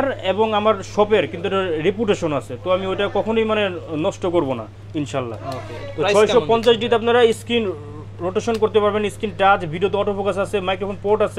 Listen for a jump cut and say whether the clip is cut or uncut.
uncut